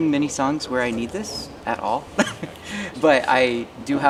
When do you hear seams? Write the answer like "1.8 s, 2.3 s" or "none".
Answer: none